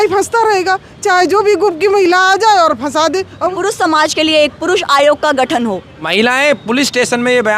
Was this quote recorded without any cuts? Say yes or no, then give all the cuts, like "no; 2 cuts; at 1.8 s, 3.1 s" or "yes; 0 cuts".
no; 2 cuts; at 3.5 s, 6.1 s